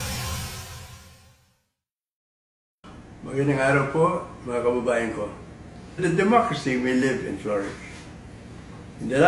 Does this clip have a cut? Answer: no; 0 cuts

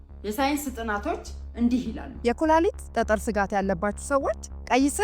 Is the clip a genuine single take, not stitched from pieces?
no; 1 cut; at 2.2 s

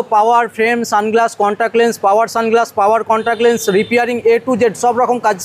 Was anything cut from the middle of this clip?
no; 0 cuts

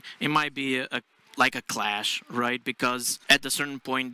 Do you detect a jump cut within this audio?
yes; 1 cut; at 3.1 s

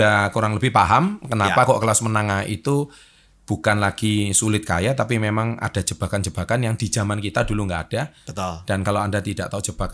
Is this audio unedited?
yes; 0 cuts

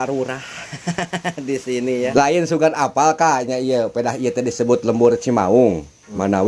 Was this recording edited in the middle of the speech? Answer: yes; 1 cut; at 2.1 s

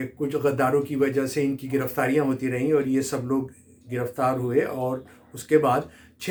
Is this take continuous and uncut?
yes; 0 cuts

